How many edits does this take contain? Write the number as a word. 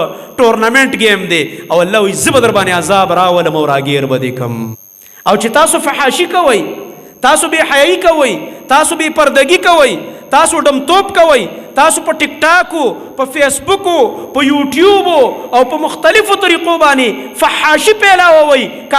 one